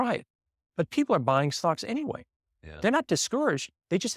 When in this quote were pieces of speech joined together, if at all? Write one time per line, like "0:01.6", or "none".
none

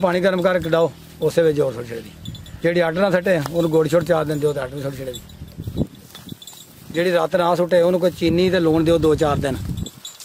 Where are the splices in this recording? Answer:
none

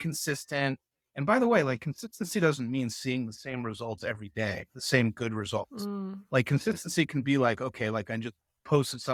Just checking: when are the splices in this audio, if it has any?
none

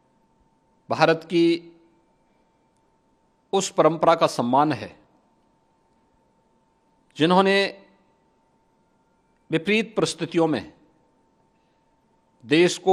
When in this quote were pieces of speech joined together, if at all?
none

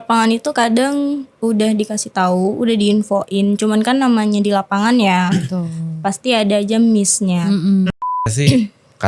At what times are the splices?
0:07.9

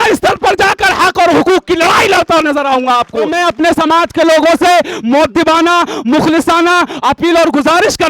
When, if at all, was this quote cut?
0:03.3

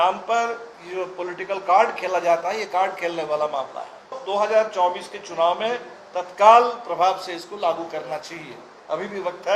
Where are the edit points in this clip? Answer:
0:04.2

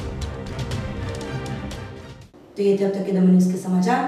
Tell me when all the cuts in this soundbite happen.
none

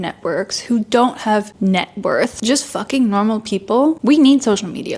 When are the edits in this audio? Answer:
0:01.5
0:02.4
0:04.0

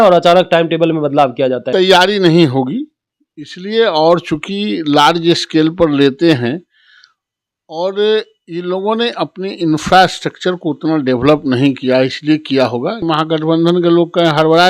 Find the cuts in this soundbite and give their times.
0:01.6
0:13.0

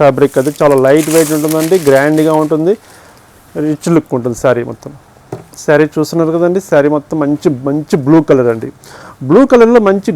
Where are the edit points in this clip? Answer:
none

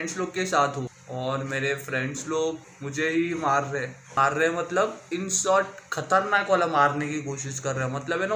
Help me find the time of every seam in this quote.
0:01.0
0:02.7
0:04.0

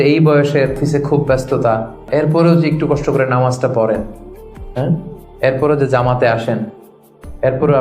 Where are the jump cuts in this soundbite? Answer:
0:00.8
0:02.1

